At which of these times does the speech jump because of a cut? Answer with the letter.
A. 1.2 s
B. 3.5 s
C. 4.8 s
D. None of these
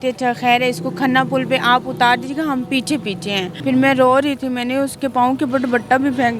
B